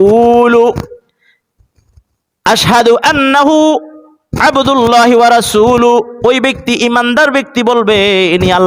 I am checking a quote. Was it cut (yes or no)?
no